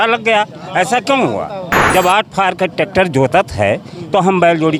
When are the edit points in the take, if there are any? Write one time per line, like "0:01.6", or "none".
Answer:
0:01.7